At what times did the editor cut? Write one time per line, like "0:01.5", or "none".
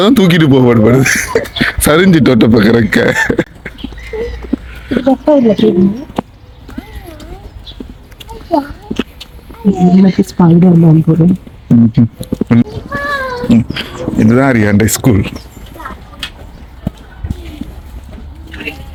none